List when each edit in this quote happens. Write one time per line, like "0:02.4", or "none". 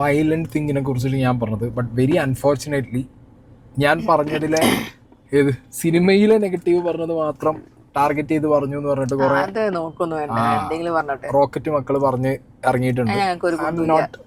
none